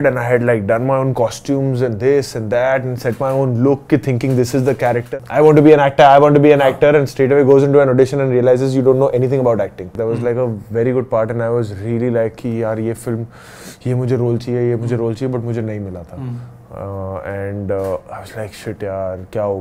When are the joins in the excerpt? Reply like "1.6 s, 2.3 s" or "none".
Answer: 5.1 s, 10.0 s

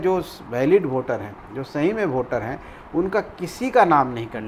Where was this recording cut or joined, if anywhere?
none

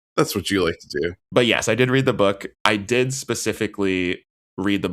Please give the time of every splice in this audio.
1.2 s

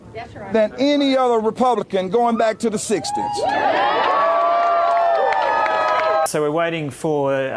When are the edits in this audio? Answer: 6.3 s

